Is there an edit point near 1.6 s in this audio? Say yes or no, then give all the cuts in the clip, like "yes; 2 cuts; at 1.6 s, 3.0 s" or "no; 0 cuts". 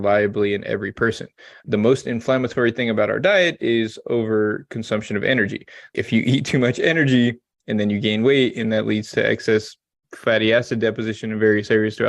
no; 1 cut; at 5.9 s